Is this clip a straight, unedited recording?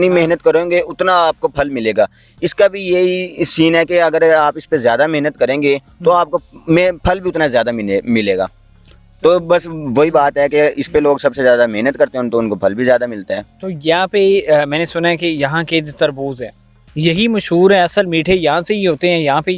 yes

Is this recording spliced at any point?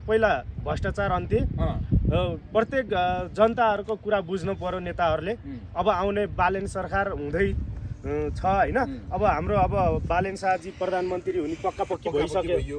no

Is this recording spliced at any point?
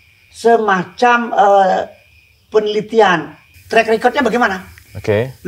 no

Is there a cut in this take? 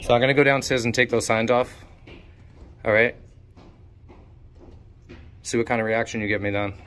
no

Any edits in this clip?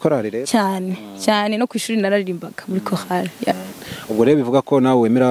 yes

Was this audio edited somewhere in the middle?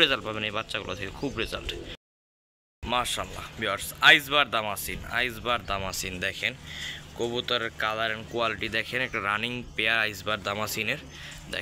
no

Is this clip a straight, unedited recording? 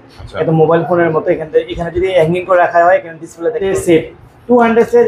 no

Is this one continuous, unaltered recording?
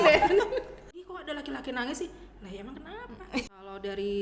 no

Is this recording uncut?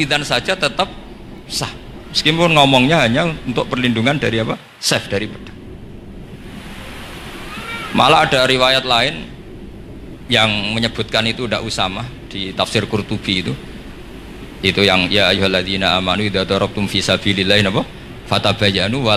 yes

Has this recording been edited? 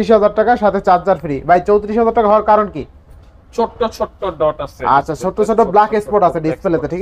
no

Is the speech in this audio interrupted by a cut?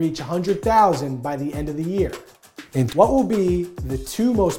yes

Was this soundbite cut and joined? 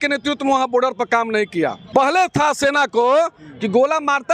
yes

